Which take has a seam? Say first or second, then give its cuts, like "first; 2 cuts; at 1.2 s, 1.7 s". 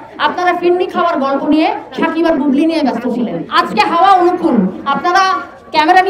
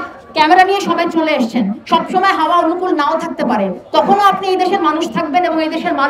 first; 1 cut; at 3.4 s